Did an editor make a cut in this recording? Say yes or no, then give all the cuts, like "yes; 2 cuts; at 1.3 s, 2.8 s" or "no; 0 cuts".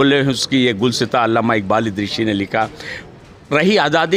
no; 0 cuts